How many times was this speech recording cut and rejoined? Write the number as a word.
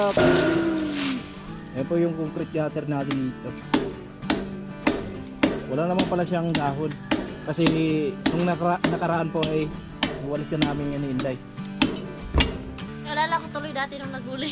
zero